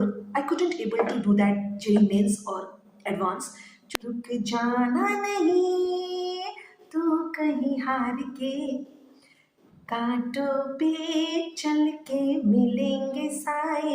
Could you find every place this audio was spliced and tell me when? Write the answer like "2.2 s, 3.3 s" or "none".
3.8 s